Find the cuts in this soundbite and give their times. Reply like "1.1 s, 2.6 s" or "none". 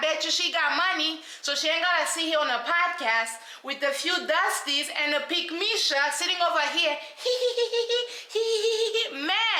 none